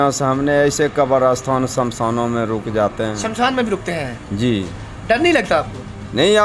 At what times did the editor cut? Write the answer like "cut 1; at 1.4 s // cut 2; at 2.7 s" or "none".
none